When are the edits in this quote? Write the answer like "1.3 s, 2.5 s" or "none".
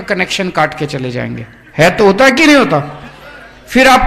none

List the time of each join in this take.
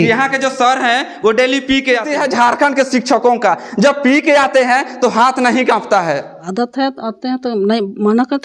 2.1 s, 6.4 s

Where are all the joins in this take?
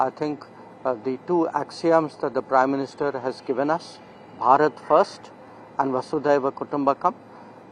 none

